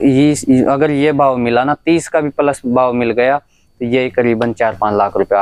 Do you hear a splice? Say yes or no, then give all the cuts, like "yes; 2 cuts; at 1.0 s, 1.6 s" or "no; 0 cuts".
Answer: no; 0 cuts